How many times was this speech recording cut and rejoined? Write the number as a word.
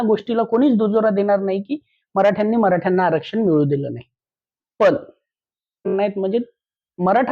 one